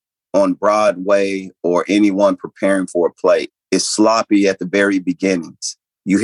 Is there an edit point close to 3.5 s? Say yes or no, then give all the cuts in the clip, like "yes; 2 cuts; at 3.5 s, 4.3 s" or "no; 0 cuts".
yes; 1 cut; at 3.5 s